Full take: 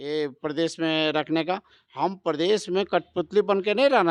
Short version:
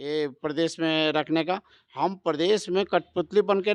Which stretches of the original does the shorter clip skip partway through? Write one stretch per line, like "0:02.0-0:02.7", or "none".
none